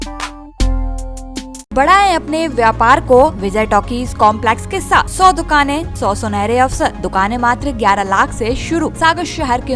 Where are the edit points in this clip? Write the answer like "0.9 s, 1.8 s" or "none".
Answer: 1.7 s, 3.4 s, 5.1 s, 5.9 s, 7.0 s, 8.9 s